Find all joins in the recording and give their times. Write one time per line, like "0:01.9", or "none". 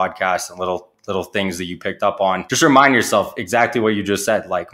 0:02.5